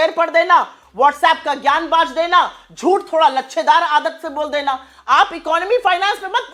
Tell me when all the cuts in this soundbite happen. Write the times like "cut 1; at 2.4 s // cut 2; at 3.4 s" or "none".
none